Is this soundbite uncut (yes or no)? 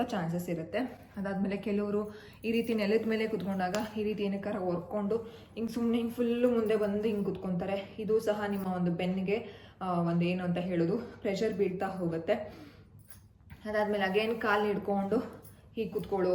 yes